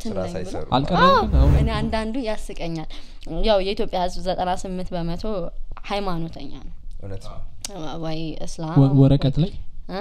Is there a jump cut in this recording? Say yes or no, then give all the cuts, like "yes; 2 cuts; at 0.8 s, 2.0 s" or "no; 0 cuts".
yes; 1 cut; at 1.6 s